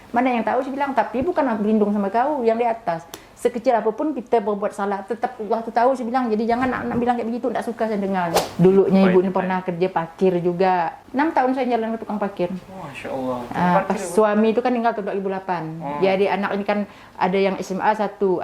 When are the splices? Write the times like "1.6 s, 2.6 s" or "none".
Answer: 8.4 s, 11.0 s